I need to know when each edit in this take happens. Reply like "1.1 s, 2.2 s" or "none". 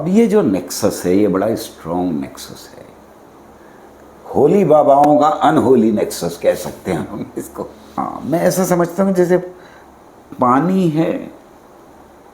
7.8 s